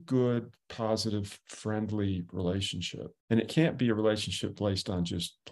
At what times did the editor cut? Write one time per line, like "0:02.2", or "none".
0:03.1